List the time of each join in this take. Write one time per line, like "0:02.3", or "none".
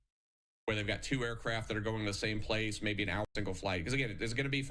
0:03.3